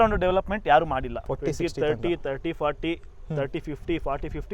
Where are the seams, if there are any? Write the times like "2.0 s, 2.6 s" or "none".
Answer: 1.1 s

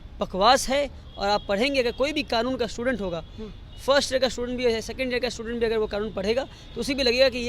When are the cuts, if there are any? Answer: none

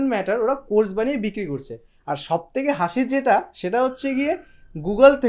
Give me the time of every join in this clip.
none

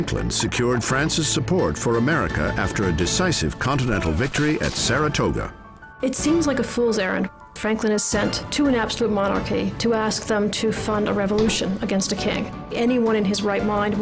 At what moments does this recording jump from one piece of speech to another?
none

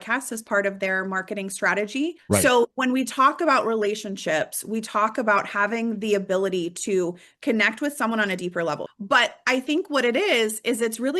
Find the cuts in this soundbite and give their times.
2.2 s, 8.9 s

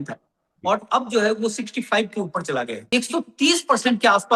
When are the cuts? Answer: 2.9 s

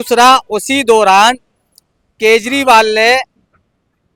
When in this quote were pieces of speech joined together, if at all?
none

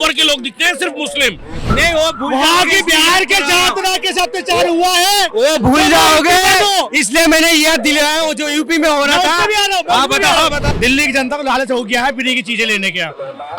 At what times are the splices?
1.6 s, 10.7 s

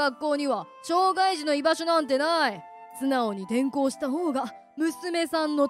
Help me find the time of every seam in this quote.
none

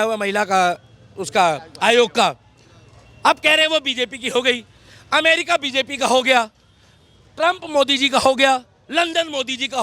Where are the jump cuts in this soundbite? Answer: none

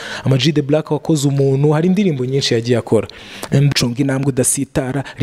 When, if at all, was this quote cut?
3.7 s

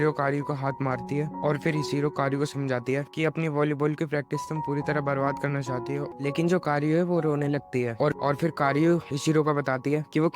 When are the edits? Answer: 6.1 s, 8.2 s

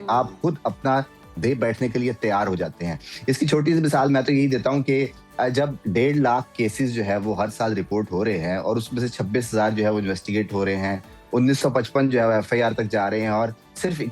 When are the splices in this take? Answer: none

